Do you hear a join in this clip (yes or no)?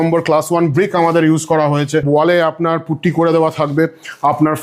yes